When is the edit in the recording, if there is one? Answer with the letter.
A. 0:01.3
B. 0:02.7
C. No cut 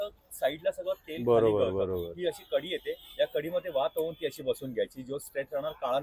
C